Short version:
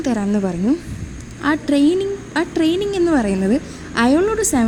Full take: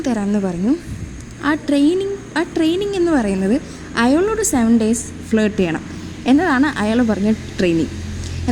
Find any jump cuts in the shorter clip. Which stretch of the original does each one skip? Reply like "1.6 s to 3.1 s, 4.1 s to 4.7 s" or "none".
none